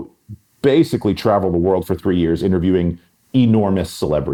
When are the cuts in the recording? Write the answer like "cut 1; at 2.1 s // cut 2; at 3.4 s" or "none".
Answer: none